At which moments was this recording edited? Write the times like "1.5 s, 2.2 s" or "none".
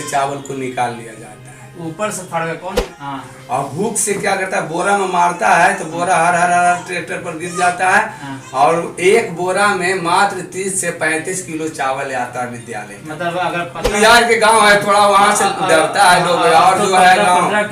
2.7 s, 13.9 s